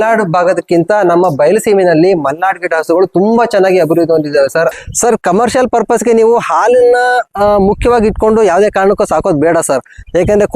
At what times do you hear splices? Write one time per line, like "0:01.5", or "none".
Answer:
0:04.7